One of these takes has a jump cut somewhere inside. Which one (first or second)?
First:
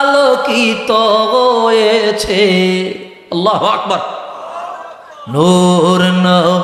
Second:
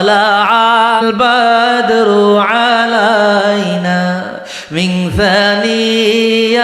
second